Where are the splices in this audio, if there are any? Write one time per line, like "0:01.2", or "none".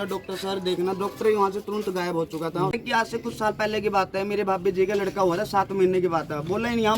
0:02.8